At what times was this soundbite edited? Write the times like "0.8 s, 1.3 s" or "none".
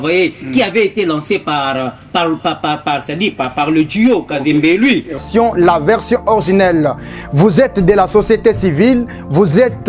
5.2 s